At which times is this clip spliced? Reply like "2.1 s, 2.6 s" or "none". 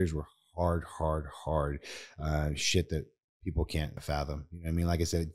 4.0 s